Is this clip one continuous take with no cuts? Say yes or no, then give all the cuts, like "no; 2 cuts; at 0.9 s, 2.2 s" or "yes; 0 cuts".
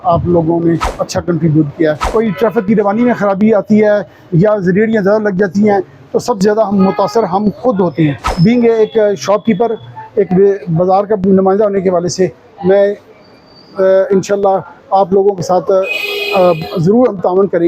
no; 3 cuts; at 0.9 s, 2.0 s, 8.3 s